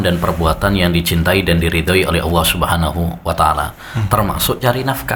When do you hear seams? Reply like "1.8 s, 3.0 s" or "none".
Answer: none